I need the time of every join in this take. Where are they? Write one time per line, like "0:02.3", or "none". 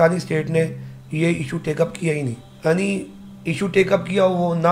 0:02.5